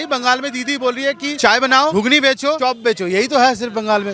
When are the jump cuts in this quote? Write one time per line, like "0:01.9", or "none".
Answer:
0:01.3
0:02.6

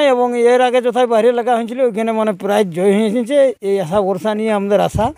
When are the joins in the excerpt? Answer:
none

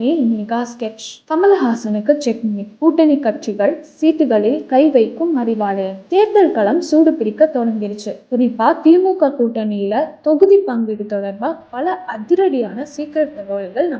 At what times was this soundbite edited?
none

